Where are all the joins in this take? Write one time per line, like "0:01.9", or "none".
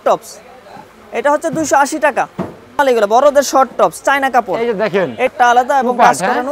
0:02.8
0:05.3